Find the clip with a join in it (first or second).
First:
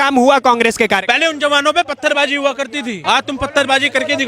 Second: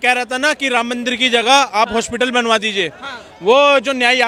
first